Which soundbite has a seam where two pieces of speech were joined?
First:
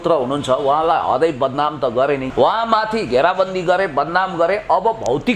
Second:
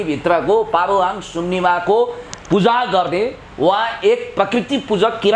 first; 1 cut; at 2.3 s

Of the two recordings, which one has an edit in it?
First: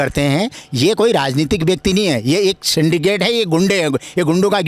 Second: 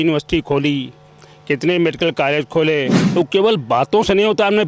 second; 1 cut; at 3.0 s

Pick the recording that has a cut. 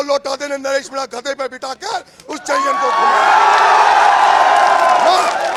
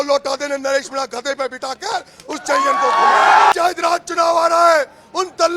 second; 1 cut; at 3.5 s

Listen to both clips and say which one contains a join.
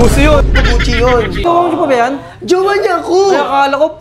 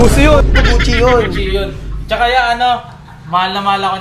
first; 1 cut; at 1.4 s

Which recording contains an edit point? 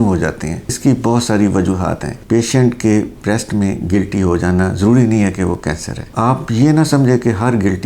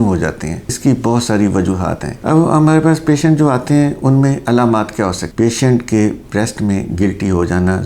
first; 1 cut; at 2.1 s

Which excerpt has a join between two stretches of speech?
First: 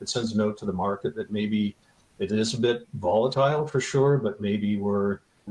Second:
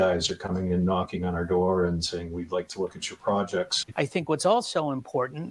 second; 1 cut; at 3.8 s

